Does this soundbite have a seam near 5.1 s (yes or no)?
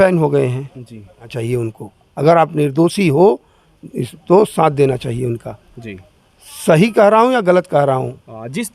no